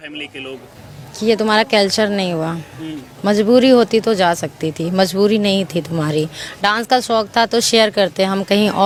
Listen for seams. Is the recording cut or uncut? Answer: uncut